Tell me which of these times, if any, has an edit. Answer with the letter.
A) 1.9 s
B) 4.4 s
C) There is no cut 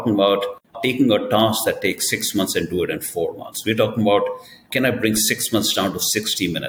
C